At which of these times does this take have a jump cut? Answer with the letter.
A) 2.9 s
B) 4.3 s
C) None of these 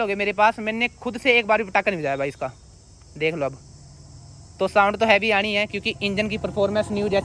C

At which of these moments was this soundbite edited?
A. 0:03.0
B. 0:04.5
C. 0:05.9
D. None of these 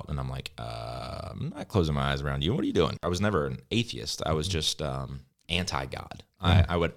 A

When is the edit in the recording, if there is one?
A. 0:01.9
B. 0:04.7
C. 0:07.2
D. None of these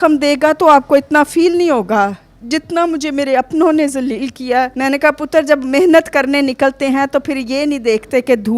B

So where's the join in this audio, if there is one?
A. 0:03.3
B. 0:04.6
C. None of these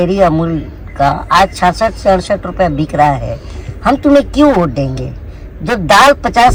C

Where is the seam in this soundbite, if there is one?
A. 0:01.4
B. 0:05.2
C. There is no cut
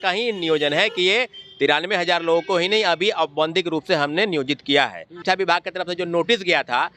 B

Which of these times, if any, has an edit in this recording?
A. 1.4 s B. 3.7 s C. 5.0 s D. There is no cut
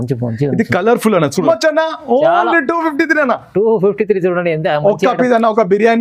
A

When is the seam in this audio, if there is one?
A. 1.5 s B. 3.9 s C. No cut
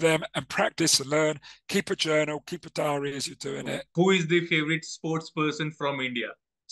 B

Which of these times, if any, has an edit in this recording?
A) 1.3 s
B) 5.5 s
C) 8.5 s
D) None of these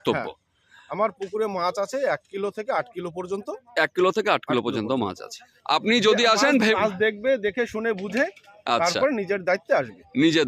B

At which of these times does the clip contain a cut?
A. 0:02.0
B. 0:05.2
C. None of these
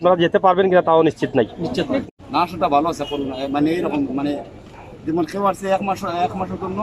A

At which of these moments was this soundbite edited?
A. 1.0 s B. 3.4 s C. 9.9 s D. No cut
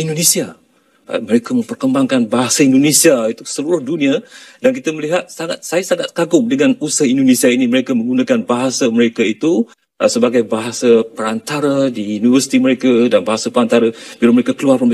D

